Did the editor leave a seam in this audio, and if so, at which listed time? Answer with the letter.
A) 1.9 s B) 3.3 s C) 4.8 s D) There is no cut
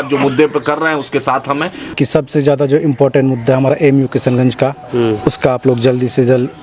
A